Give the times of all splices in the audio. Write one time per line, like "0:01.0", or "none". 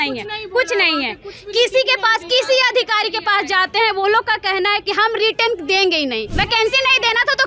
0:06.3